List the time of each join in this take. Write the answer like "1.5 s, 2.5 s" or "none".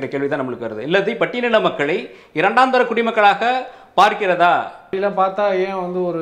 4.9 s